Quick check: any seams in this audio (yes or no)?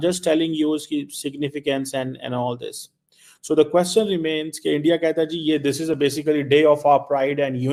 no